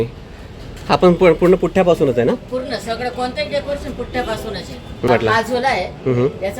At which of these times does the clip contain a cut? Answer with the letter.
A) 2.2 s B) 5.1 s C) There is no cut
B